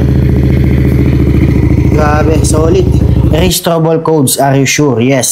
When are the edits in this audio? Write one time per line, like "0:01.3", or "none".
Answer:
0:03.3